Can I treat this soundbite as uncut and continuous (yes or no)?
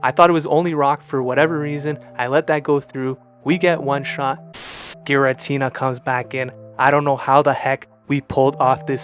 no